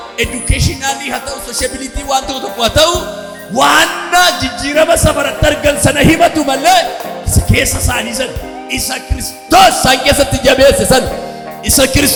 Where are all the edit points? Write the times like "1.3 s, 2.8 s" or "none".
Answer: none